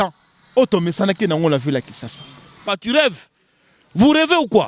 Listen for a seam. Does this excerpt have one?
yes; 1 cut; at 2.6 s

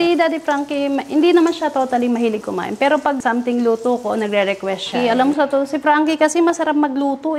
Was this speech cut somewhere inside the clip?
yes; 2 cuts; at 3.2 s, 4.9 s

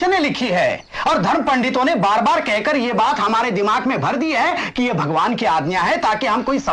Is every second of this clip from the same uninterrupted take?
yes; 0 cuts

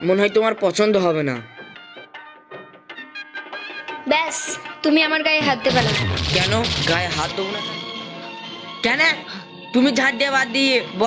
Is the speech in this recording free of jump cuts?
no; 2 cuts; at 3.0 s, 7.6 s

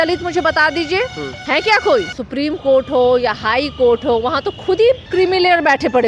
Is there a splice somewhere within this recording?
yes; 3 cuts; at 1.3 s, 2.2 s, 5.0 s

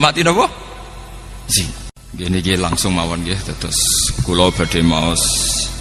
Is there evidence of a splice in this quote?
yes; 1 cut; at 2.0 s

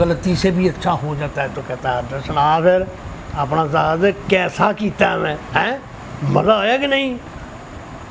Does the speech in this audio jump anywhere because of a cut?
no; 0 cuts

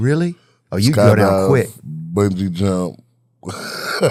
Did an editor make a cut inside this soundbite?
no; 0 cuts

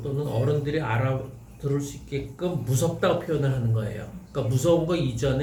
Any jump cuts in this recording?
no; 0 cuts

